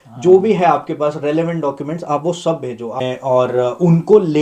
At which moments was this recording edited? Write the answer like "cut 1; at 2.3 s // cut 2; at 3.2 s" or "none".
cut 1; at 3.0 s